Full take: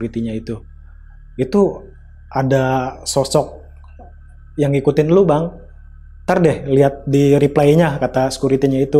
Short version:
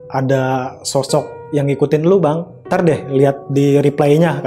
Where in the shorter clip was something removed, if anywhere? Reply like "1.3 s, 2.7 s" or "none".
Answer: 1.4 s, 2.5 s